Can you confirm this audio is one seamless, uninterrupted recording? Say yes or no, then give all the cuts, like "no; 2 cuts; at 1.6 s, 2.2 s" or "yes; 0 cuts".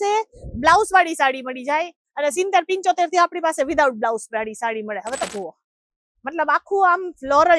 no; 1 cut; at 5.3 s